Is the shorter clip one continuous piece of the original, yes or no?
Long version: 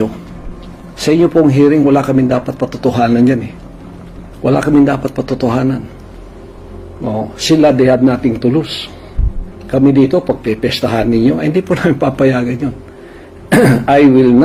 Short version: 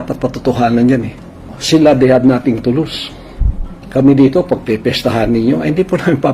no